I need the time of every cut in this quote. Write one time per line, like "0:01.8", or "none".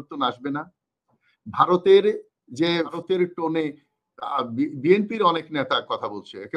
0:03.0

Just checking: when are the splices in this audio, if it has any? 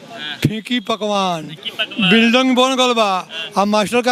none

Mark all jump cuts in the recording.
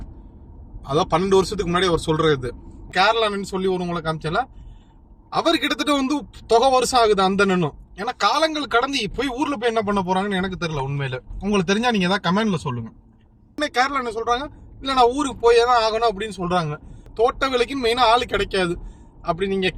0:02.9
0:13.6
0:17.1

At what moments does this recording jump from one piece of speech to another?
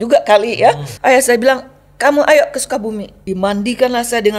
0:00.9
0:03.1

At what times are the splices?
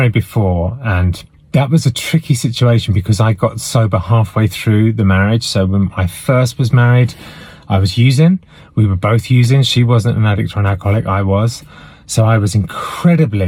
none

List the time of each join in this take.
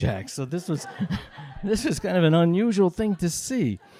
none

